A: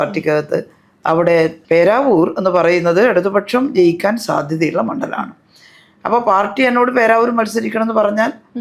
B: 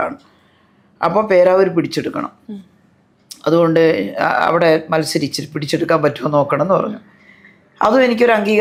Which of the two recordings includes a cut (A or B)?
A